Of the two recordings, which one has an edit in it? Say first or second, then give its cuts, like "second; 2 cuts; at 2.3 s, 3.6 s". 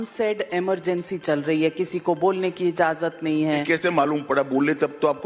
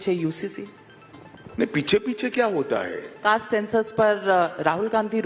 second; 1 cut; at 3.0 s